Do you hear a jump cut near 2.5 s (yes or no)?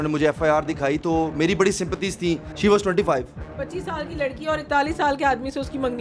yes